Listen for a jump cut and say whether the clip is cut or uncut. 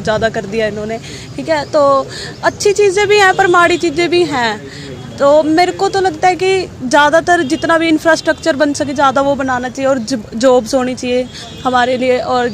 uncut